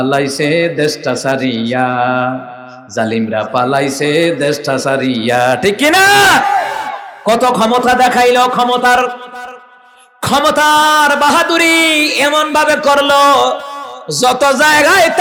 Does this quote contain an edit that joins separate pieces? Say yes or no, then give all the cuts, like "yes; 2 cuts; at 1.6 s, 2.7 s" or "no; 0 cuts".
no; 0 cuts